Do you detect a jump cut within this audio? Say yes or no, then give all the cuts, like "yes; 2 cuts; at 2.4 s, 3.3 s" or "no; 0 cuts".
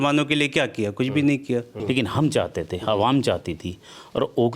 yes; 1 cut; at 1.7 s